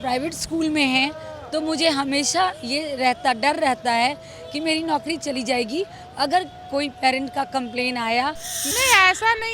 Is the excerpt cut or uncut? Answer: cut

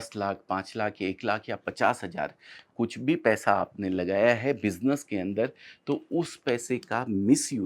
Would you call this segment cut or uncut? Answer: uncut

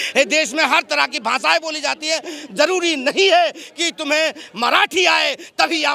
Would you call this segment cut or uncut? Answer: uncut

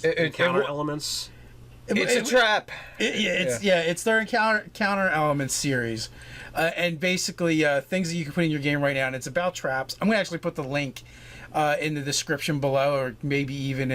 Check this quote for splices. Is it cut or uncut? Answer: cut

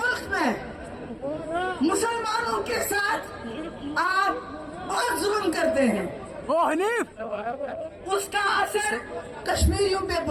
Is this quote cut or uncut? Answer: uncut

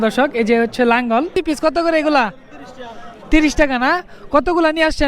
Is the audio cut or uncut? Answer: cut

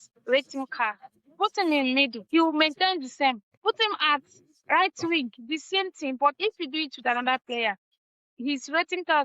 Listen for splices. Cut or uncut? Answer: cut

